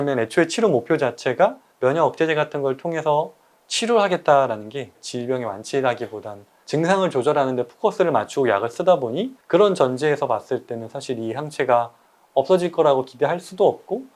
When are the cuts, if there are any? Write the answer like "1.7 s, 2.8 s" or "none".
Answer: 1.6 s, 9.3 s